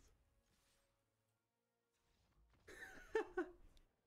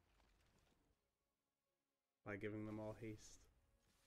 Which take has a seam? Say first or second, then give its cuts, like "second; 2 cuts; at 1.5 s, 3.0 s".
second; 1 cut; at 1.0 s